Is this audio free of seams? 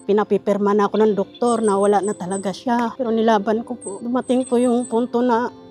no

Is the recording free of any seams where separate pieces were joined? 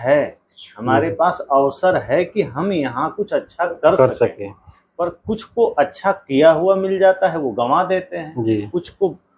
yes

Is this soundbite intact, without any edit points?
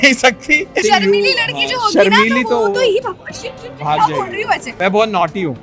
no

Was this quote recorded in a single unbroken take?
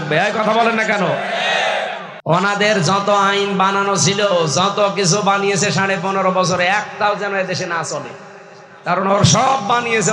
no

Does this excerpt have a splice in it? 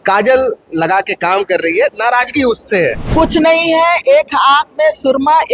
yes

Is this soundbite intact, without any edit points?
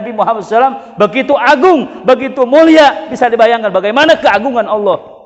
yes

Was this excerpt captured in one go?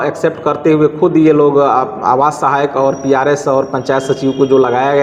yes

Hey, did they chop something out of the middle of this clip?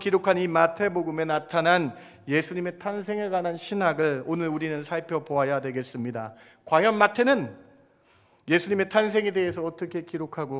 no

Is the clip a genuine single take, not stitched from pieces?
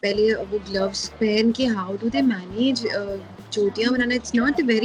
yes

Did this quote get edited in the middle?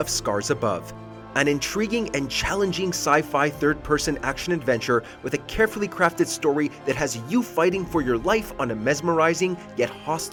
no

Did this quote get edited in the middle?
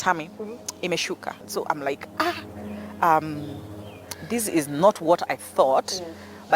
yes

